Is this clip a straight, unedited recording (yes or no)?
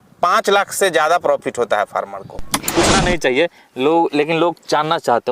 no